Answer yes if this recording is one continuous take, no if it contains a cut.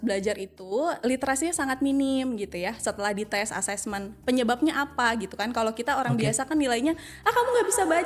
no